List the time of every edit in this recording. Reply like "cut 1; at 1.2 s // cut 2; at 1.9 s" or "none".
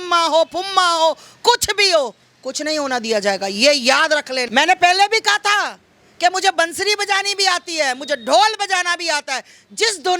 cut 1; at 4.4 s